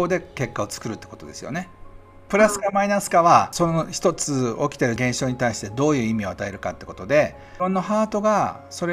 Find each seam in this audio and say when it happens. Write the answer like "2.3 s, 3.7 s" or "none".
2.2 s, 3.5 s, 5.0 s, 7.4 s